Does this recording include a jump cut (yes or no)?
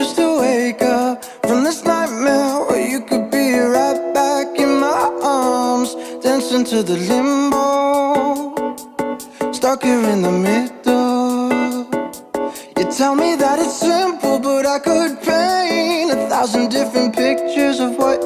yes